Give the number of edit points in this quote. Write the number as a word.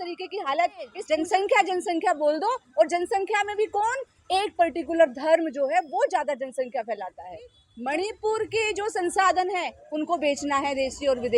two